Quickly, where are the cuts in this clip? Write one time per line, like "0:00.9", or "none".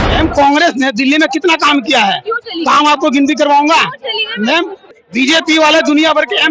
0:05.0